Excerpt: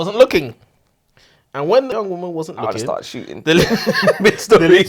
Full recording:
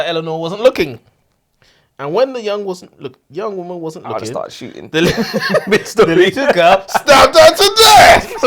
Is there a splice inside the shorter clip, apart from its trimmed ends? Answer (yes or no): yes